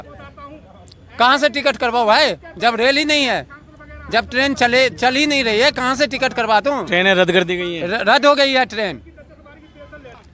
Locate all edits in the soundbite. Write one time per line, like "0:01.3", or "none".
none